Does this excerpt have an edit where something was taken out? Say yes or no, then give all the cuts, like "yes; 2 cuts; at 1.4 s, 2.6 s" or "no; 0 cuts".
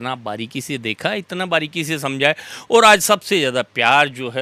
no; 0 cuts